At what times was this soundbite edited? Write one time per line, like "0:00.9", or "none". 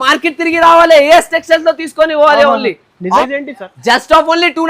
0:03.2